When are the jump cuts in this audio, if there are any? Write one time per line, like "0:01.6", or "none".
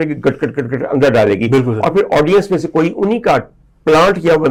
none